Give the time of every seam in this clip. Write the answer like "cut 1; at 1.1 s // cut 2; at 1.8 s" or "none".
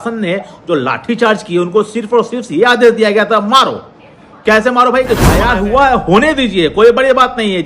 cut 1; at 5.4 s